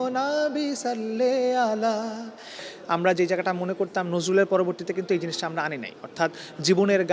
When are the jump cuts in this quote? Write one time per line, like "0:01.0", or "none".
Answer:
0:02.6